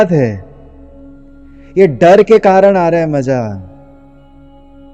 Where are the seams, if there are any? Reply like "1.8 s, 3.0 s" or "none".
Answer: 4.0 s